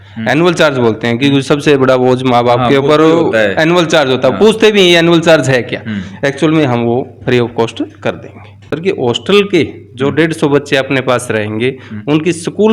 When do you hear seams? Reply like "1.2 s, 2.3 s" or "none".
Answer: 8.7 s